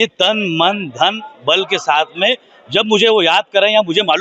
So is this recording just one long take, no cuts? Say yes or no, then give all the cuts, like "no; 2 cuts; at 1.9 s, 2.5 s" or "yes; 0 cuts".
yes; 0 cuts